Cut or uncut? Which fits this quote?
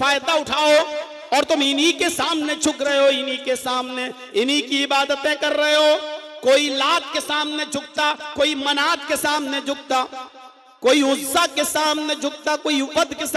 uncut